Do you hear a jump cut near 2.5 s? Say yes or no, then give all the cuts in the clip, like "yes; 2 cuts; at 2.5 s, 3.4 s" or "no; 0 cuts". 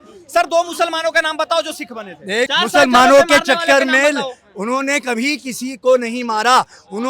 yes; 1 cut; at 2.5 s